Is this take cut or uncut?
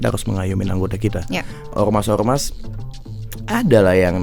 cut